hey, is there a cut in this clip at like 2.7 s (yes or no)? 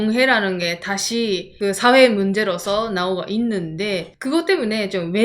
no